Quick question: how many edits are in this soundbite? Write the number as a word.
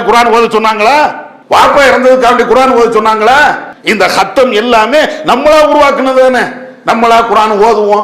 one